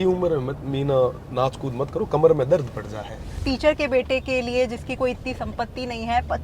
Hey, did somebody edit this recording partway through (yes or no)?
yes